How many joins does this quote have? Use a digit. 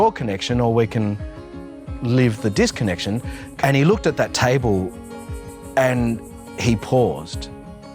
1